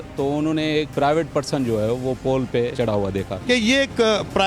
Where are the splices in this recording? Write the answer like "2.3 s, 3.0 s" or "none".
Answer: 0.9 s, 3.1 s

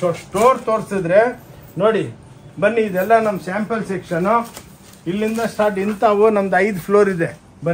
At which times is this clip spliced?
none

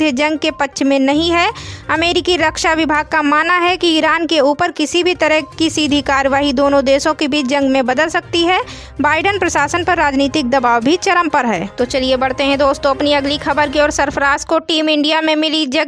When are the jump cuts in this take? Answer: 11.6 s

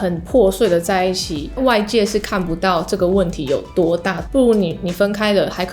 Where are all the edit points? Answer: 1.4 s, 4.2 s

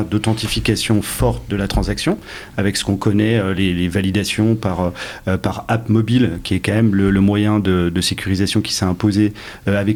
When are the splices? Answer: none

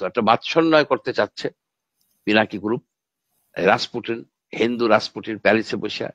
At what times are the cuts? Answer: none

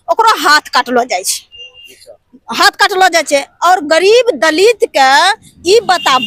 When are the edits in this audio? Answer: none

